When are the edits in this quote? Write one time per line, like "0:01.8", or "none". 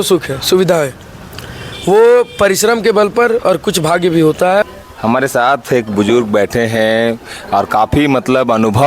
0:04.6